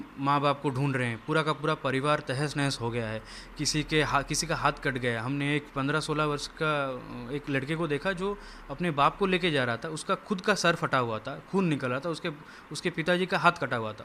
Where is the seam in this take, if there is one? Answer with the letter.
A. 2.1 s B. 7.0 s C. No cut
C